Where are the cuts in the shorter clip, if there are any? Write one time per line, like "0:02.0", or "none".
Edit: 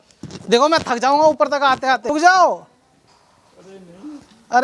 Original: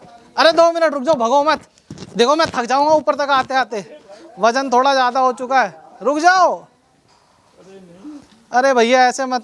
0:02.1